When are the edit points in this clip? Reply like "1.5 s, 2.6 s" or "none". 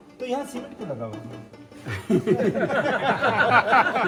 none